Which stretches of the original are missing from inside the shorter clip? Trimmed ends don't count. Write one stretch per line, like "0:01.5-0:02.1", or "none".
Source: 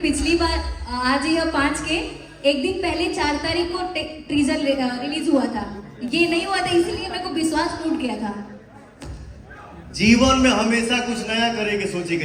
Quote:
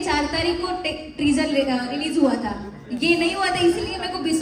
none

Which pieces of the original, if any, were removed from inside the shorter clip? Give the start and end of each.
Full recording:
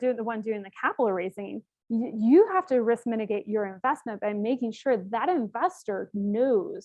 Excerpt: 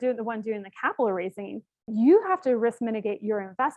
0:01.8-0:02.1

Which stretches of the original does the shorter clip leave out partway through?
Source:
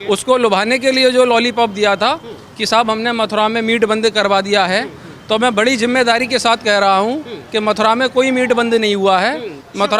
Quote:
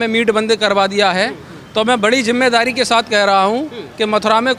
none

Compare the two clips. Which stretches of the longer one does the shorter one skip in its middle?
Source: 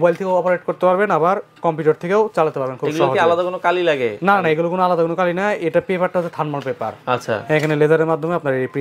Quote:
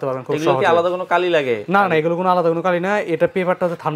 none

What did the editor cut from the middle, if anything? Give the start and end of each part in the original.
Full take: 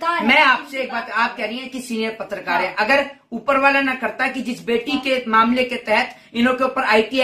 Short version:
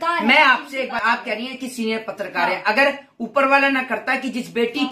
0:01.0-0:01.1

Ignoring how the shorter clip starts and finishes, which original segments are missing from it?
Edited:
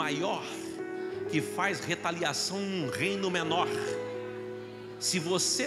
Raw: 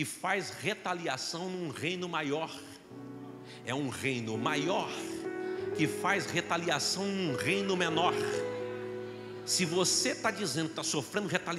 none

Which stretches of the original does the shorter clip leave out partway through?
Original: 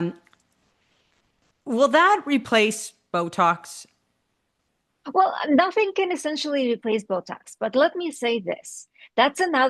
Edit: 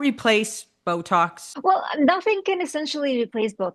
0:03.7-0:04.9

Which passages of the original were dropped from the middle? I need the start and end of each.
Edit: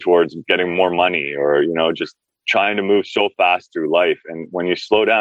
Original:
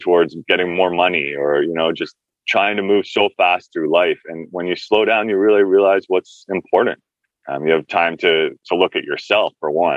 none

